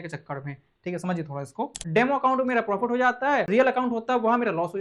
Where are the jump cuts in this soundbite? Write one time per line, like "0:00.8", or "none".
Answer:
0:01.8
0:03.5